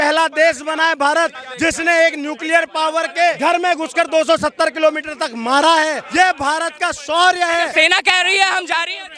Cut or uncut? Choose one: cut